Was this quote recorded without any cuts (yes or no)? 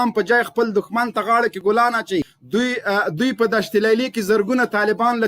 no